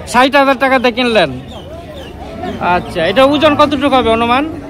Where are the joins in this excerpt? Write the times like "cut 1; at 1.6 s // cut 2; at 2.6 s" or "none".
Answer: none